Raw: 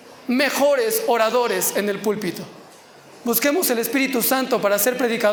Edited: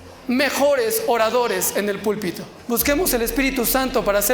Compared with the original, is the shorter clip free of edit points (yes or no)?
no